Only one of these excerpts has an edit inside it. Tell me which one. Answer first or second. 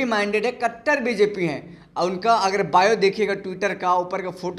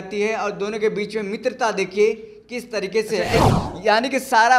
second